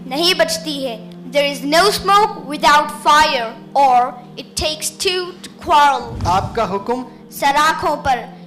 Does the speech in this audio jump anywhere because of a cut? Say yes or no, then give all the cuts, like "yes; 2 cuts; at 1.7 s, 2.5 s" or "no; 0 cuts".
yes; 1 cut; at 6.1 s